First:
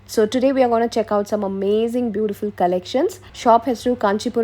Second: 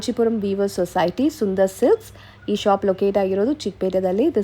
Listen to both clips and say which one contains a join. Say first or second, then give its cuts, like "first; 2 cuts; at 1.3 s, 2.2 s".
first; 1 cut; at 3.3 s